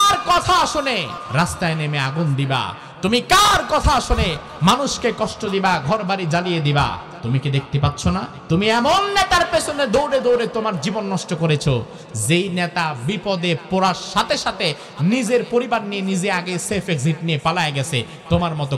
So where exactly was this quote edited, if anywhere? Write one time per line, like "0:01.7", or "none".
0:01.2
0:07.1
0:08.3